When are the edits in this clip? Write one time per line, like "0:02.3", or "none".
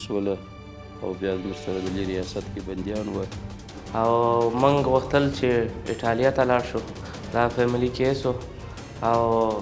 0:03.8